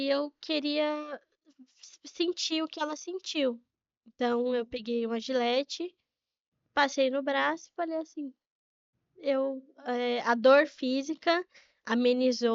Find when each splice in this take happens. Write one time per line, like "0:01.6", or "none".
none